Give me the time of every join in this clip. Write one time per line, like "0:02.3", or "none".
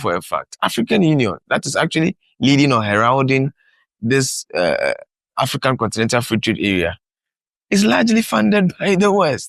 none